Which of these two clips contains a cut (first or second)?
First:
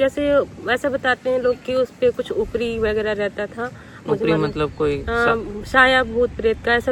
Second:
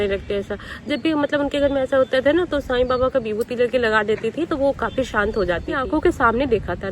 second